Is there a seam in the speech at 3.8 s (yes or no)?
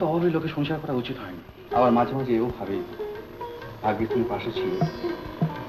no